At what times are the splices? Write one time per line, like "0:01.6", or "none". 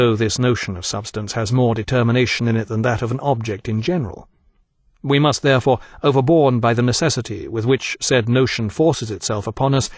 0:08.7